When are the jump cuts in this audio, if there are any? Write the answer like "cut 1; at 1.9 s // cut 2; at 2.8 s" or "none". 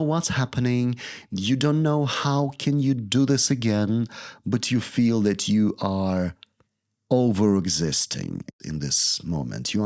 none